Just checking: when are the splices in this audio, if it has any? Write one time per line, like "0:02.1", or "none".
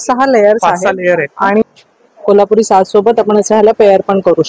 0:01.7